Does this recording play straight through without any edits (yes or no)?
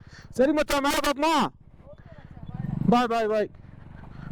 yes